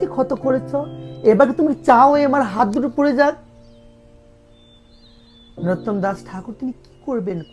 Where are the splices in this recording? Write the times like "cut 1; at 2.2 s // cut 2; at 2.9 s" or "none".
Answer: none